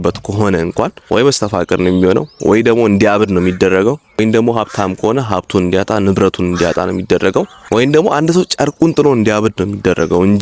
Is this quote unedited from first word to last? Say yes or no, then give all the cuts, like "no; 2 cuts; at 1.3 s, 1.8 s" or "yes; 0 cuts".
no; 4 cuts; at 1.0 s, 2.3 s, 4.2 s, 7.6 s